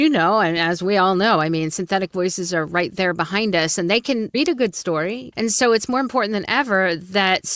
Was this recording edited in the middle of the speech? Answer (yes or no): yes